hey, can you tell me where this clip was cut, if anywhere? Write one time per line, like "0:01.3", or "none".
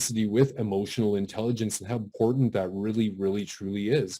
0:02.1